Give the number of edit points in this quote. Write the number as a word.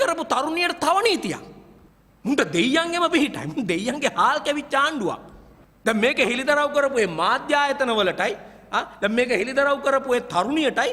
zero